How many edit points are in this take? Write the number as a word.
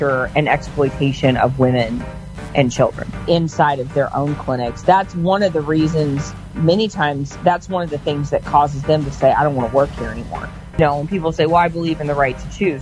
two